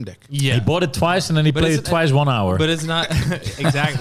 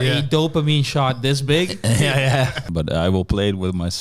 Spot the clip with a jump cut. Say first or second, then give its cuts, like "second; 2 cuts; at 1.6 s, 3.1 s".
second; 1 cut; at 2.7 s